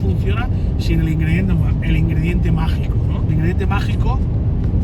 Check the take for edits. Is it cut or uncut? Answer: uncut